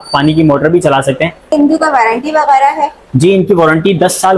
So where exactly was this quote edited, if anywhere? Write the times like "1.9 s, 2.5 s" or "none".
1.5 s